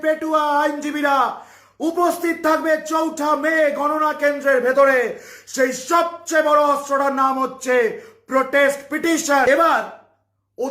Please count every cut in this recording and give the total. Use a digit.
1